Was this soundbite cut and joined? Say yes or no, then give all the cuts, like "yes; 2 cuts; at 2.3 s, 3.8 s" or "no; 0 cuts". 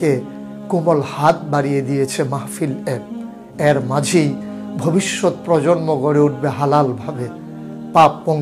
no; 0 cuts